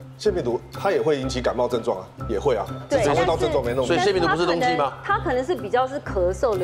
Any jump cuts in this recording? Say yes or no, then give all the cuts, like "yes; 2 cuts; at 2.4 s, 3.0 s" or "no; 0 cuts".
no; 0 cuts